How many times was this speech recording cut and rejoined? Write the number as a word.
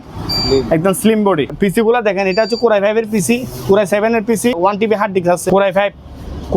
three